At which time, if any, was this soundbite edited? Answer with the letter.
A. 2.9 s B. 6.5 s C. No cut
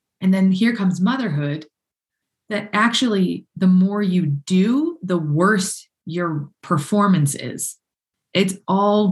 C